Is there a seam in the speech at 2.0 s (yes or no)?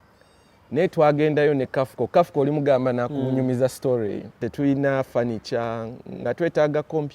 no